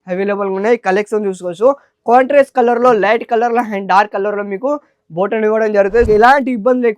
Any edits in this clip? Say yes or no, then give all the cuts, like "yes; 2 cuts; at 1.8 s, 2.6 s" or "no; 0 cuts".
yes; 1 cut; at 6.1 s